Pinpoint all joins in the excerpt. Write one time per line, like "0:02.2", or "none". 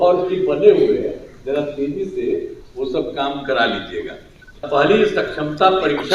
0:04.6